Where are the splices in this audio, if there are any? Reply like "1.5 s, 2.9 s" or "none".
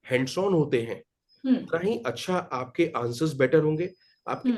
none